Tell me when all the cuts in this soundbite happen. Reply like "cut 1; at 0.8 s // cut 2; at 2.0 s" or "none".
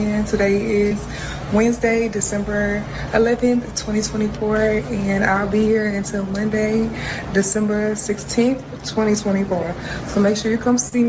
none